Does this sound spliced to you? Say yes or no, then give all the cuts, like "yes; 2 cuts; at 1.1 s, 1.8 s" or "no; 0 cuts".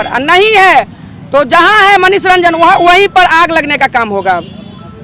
no; 0 cuts